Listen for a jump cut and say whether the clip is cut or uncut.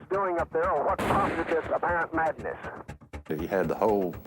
cut